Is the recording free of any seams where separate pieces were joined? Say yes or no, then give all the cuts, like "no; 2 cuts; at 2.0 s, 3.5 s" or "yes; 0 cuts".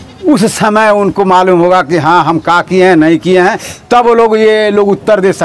yes; 0 cuts